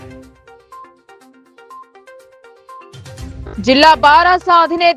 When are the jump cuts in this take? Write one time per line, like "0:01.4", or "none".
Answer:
0:01.9
0:03.4